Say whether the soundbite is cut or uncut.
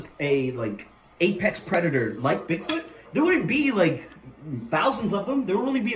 uncut